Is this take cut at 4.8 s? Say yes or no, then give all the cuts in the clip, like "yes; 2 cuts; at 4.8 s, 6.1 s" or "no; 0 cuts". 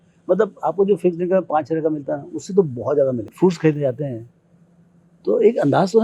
no; 1 cut; at 3.3 s